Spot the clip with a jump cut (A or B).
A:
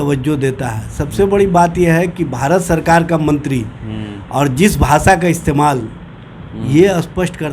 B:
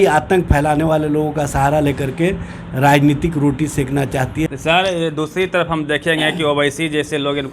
B